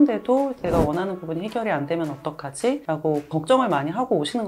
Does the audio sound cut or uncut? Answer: uncut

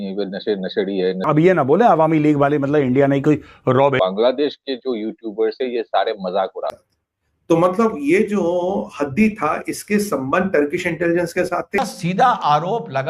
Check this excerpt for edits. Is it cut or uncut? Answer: cut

